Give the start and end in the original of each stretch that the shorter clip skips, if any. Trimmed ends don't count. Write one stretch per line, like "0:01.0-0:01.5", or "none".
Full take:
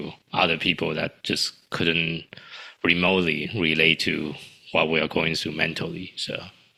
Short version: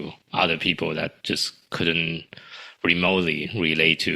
none